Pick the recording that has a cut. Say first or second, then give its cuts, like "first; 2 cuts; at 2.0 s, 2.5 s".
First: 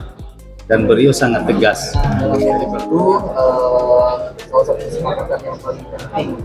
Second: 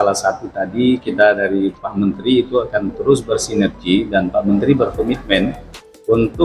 first; 1 cut; at 2.4 s